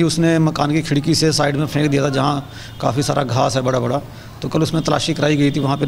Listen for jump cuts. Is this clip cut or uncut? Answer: uncut